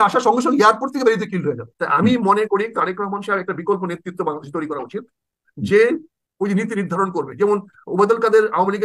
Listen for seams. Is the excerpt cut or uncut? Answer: uncut